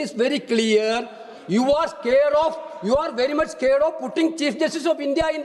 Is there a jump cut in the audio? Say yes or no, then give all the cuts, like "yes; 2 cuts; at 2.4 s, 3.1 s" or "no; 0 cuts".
no; 0 cuts